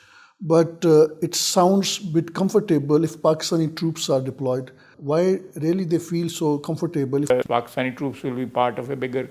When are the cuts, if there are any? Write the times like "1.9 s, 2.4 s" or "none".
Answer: 4.9 s, 7.3 s